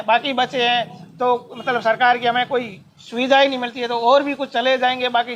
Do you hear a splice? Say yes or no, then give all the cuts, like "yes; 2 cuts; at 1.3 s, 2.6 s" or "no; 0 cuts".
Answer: no; 0 cuts